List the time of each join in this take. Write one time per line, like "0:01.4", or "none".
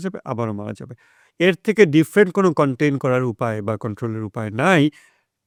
none

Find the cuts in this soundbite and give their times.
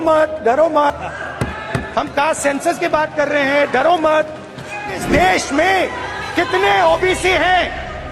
0:00.9
0:05.0

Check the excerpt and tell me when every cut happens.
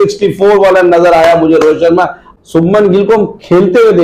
0:02.3

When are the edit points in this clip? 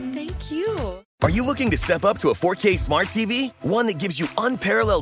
0:01.0

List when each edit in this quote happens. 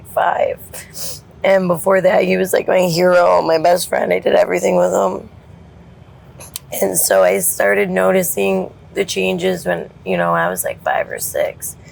none

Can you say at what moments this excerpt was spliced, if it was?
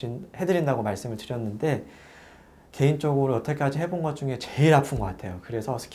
none

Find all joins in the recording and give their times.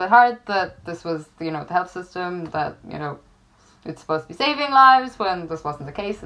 none

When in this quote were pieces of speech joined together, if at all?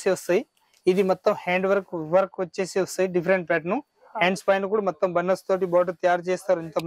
none

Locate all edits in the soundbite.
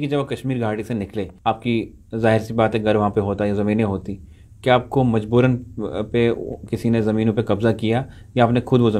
0:01.3

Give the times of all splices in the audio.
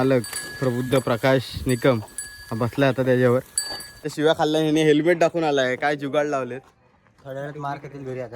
0:04.1

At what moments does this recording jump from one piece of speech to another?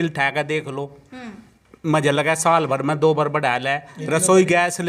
none

